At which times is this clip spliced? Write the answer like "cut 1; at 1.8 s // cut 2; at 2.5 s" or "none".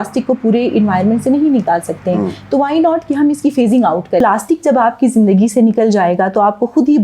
cut 1; at 4.2 s